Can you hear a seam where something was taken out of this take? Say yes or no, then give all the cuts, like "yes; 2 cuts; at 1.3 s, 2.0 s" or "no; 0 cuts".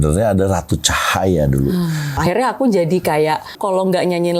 yes; 2 cuts; at 2.3 s, 3.6 s